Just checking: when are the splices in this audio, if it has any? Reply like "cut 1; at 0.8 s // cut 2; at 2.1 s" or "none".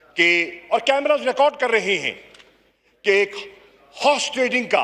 none

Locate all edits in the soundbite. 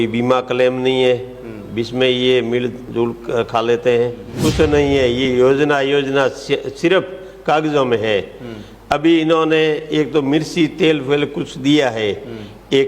cut 1; at 4.2 s

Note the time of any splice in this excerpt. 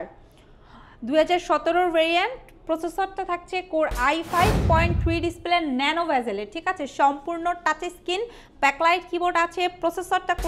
cut 1; at 4.6 s

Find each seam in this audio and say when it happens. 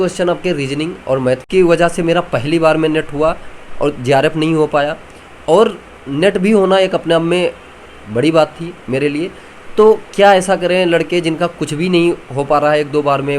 cut 1; at 1.4 s

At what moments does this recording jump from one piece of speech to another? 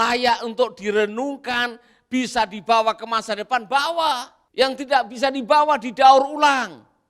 cut 1; at 4.4 s

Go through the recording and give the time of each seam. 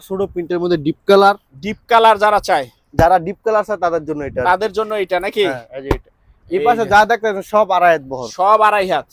none

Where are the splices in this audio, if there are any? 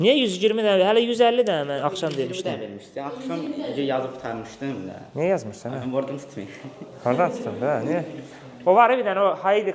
none

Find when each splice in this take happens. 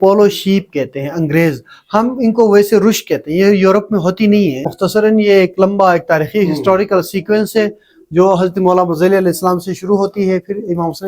cut 1; at 4.7 s

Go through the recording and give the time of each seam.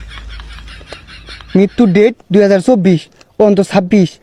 none

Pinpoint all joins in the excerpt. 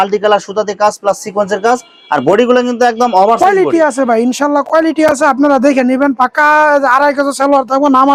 none

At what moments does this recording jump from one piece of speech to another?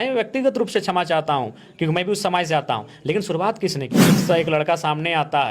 cut 1; at 4.0 s

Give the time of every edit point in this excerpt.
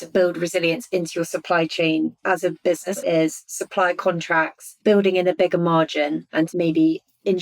cut 1; at 3.0 s // cut 2; at 4.6 s // cut 3; at 6.5 s

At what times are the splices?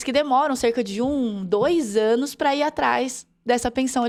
none

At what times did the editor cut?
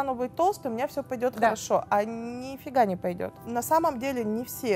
cut 1; at 3.4 s

